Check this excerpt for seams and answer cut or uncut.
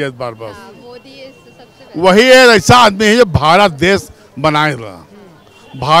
uncut